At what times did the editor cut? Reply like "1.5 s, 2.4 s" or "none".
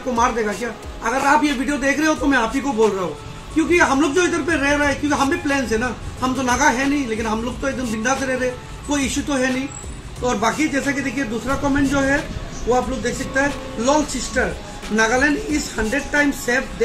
none